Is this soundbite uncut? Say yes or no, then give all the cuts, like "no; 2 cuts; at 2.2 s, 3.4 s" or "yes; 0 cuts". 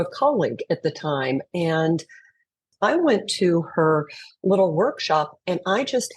no; 1 cut; at 2.7 s